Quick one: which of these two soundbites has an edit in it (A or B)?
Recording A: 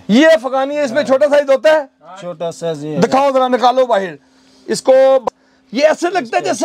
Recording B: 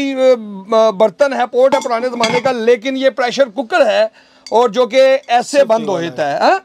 A